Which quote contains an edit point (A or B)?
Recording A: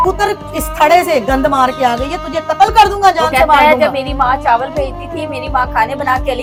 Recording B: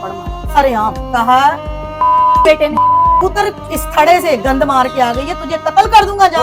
B